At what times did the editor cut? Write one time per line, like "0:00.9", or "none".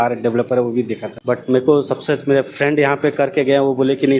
0:01.1